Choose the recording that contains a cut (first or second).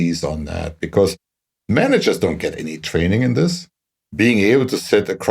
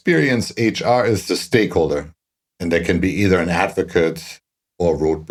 first